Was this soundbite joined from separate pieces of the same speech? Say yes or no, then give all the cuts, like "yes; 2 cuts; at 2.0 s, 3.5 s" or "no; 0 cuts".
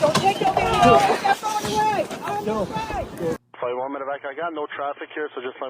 yes; 1 cut; at 3.3 s